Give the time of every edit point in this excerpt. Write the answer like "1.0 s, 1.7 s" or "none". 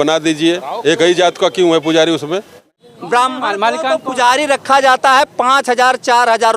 2.8 s